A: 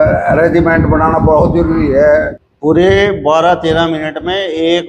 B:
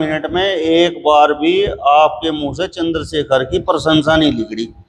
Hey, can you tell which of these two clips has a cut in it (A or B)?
A